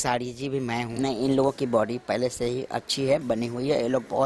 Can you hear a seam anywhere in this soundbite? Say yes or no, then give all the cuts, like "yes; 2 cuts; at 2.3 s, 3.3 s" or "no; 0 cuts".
yes; 1 cut; at 0.9 s